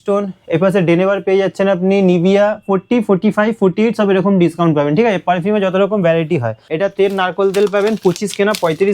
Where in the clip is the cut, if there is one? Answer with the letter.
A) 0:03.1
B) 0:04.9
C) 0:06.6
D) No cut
C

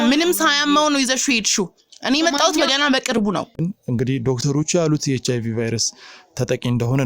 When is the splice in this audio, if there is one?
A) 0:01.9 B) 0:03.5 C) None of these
B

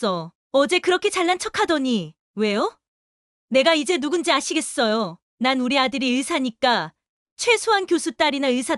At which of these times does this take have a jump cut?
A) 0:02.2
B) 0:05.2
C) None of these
B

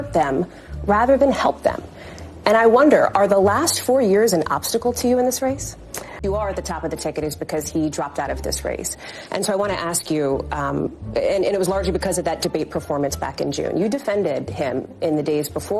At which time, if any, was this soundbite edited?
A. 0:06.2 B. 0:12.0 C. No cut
A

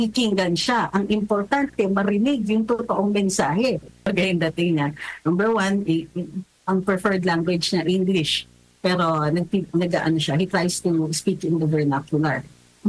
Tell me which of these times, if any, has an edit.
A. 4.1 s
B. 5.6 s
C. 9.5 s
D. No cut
A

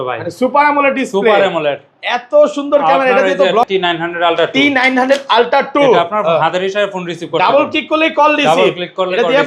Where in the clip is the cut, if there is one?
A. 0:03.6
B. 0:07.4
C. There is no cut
A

